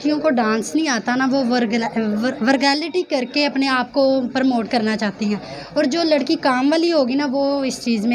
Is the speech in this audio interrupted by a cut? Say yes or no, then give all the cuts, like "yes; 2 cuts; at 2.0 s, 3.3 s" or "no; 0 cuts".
no; 0 cuts